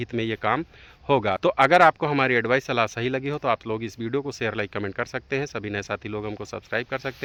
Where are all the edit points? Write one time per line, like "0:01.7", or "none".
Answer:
none